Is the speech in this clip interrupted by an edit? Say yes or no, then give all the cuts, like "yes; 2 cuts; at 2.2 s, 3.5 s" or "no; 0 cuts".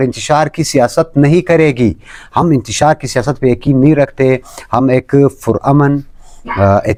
no; 0 cuts